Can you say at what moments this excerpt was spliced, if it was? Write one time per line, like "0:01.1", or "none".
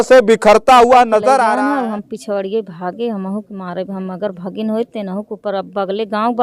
0:01.5